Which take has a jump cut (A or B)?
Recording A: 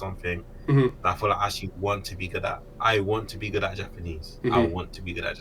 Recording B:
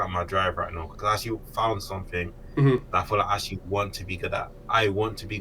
B